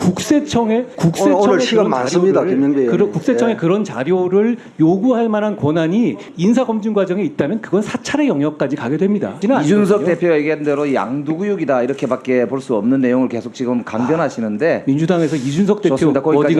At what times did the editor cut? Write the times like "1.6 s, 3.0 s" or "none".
0.9 s, 6.3 s, 9.3 s